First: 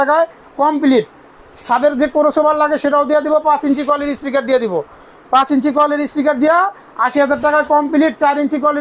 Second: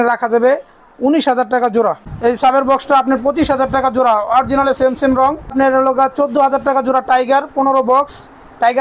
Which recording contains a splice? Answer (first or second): second